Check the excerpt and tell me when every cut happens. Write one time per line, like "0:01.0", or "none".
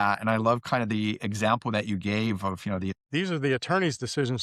0:02.9

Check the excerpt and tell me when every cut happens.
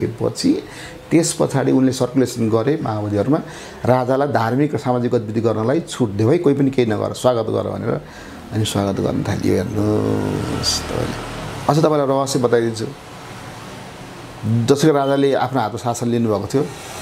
none

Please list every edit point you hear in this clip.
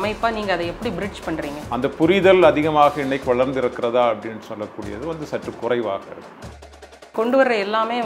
0:01.6
0:06.9

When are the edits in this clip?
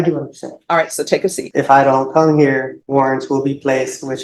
0:01.4
0:02.8

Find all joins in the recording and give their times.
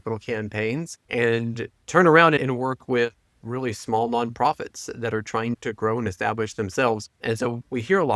0:01.0
0:01.7
0:07.1

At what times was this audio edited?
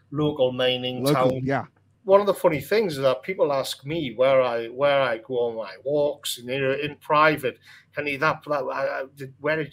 0:01.9

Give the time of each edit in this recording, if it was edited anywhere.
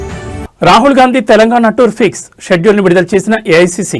none

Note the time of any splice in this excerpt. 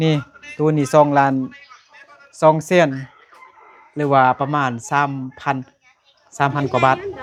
none

